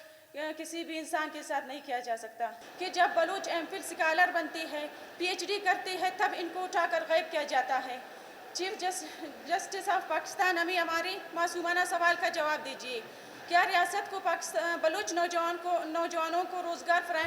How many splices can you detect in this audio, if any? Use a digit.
1